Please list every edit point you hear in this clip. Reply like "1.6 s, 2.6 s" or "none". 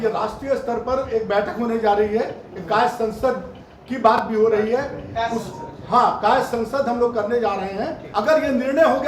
8.0 s

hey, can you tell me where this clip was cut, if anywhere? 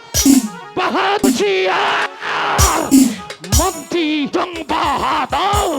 1.2 s, 4.3 s

